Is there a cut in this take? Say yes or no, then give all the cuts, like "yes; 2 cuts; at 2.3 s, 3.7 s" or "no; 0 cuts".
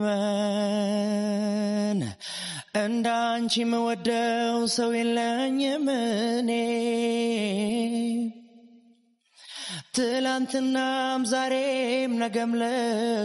no; 0 cuts